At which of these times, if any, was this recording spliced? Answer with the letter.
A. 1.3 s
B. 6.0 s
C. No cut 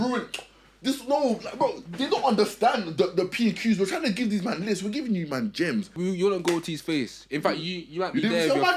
B